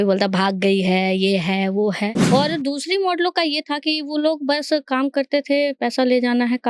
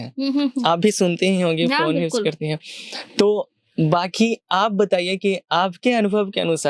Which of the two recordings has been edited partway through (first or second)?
first